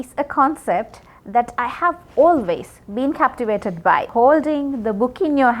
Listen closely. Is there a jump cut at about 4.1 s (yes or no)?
yes